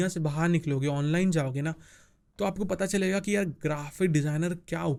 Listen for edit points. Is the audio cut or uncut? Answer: uncut